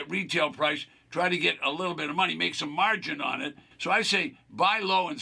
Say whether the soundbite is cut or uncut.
cut